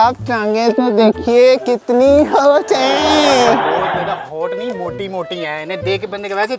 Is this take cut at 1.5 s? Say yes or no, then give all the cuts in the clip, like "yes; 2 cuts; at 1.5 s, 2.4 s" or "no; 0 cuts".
no; 0 cuts